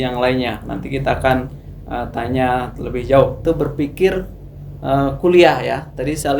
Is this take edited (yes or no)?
yes